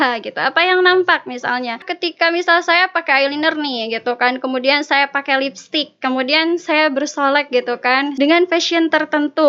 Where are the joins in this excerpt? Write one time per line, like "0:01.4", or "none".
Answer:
0:02.0
0:08.1